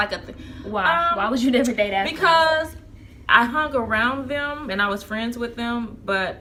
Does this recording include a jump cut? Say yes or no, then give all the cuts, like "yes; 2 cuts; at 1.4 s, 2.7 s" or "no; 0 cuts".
no; 0 cuts